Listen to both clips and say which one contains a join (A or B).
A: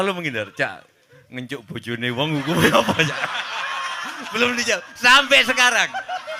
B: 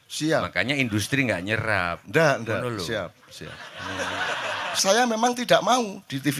B